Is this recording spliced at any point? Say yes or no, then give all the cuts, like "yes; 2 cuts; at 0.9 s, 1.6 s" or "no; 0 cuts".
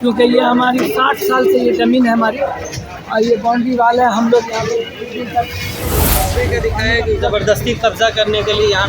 yes; 1 cut; at 6.2 s